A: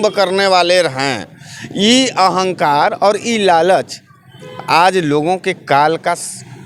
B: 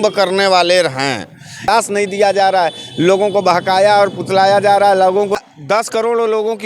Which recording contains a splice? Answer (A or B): B